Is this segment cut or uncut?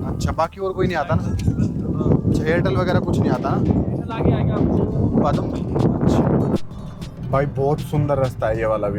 cut